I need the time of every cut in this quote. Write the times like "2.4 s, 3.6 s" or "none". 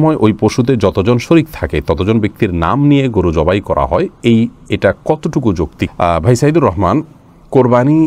none